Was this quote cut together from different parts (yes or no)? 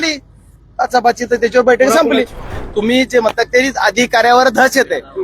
yes